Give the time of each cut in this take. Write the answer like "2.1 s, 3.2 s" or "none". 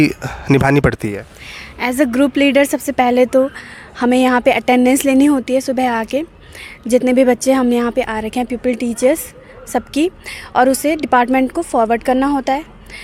none